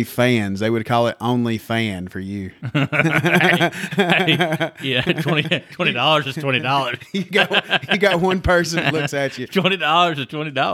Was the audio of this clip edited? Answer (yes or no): no